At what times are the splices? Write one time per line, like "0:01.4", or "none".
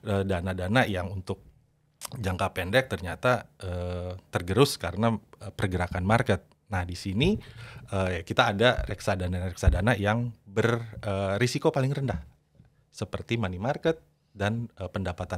none